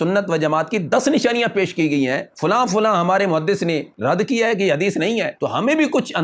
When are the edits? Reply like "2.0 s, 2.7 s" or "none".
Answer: 2.3 s, 3.9 s, 5.3 s